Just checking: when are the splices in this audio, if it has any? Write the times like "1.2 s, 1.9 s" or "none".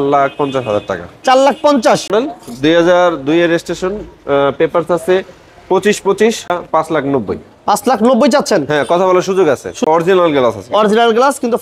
2.1 s, 6.6 s, 9.9 s